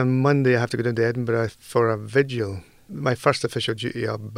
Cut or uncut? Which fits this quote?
cut